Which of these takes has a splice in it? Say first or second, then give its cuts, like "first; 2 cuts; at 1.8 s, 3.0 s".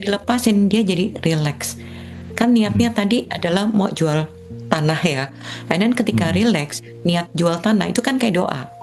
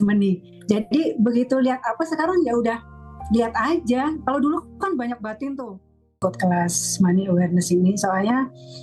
second; 1 cut; at 6.1 s